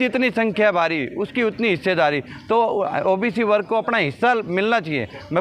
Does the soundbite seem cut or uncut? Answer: uncut